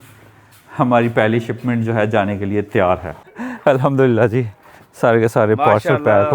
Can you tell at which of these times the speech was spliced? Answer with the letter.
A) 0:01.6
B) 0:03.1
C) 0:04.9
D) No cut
B